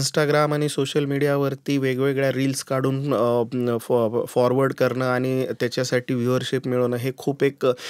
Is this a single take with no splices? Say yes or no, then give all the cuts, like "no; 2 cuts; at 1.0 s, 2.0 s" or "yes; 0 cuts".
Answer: yes; 0 cuts